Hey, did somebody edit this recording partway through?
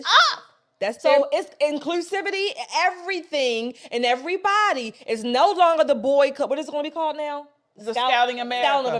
yes; 1 cut; at 1.1 s

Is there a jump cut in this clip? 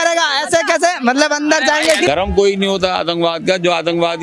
yes; 1 cut; at 2.1 s

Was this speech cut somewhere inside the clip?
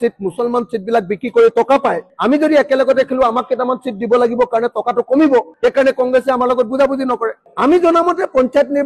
yes; 2 cuts; at 2.1 s, 7.4 s

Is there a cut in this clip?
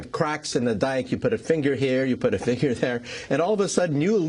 yes; 1 cut; at 1.0 s

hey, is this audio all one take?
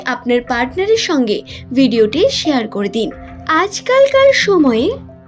no; 1 cut; at 3.4 s

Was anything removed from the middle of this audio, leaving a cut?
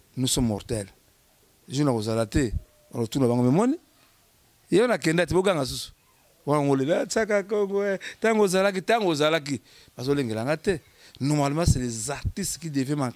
no; 0 cuts

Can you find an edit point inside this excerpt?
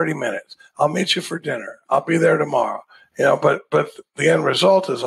no; 0 cuts

